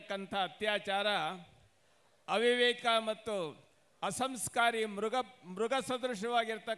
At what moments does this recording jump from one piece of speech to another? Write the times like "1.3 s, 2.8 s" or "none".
none